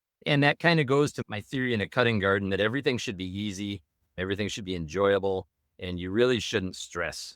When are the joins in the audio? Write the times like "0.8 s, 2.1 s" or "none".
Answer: 1.2 s